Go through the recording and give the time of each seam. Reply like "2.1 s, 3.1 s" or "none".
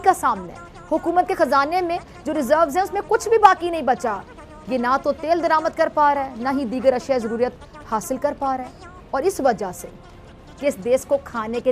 10.5 s